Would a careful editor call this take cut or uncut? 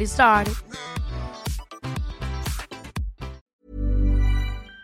cut